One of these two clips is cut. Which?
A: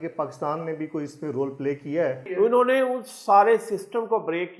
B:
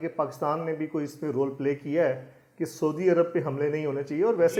A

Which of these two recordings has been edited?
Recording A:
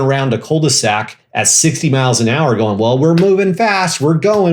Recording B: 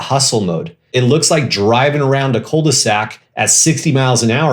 B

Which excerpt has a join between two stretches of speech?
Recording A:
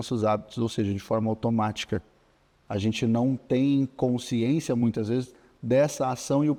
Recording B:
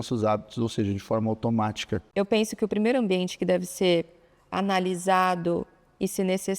B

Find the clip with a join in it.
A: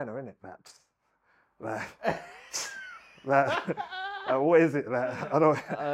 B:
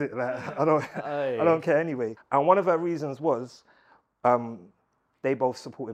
B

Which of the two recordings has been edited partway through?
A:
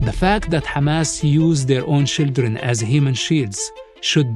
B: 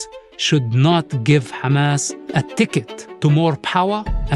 B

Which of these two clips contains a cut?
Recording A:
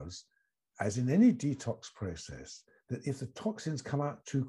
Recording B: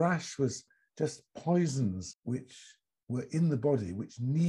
B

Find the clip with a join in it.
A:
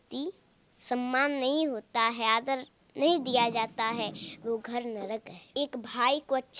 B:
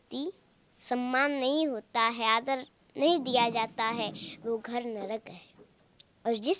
A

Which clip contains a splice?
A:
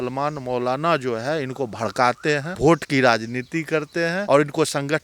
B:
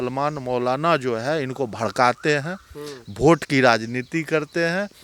A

